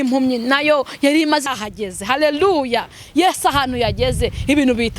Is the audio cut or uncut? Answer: cut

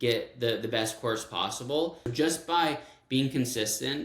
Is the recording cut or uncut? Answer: cut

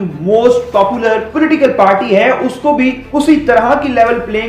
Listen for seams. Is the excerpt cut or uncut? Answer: cut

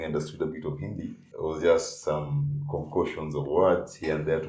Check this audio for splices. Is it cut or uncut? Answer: cut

